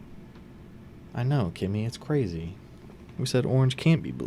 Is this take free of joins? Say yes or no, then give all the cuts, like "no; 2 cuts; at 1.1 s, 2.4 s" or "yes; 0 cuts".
yes; 0 cuts